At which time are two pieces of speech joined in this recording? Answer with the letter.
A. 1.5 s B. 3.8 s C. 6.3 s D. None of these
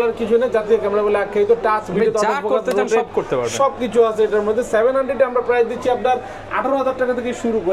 D